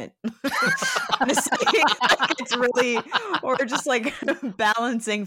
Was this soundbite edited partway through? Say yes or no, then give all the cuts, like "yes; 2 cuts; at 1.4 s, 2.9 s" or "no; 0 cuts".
no; 0 cuts